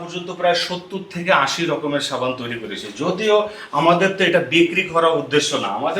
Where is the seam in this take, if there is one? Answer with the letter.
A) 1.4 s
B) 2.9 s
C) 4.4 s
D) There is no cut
D